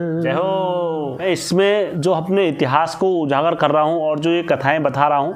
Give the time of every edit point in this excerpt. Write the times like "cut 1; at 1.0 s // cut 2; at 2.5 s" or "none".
cut 1; at 1.2 s

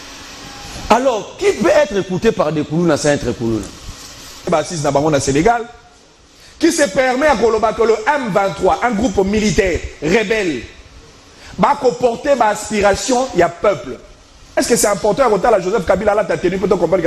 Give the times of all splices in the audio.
cut 1; at 4.5 s

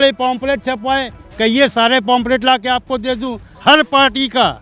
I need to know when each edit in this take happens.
none

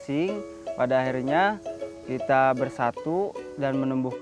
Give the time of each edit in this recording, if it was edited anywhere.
none

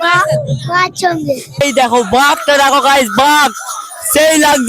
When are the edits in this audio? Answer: cut 1; at 1.6 s

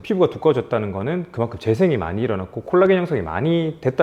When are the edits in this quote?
none

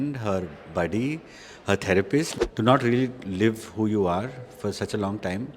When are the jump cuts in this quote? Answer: cut 1; at 2.3 s

